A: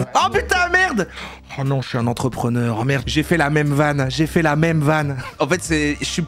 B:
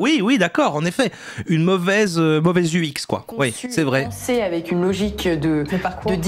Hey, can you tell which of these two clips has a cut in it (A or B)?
A